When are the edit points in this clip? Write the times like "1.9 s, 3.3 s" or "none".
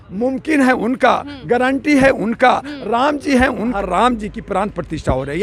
3.7 s